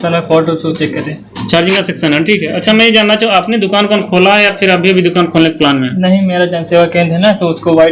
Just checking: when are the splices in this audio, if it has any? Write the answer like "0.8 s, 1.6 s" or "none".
none